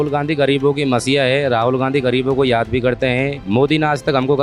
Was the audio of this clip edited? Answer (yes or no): no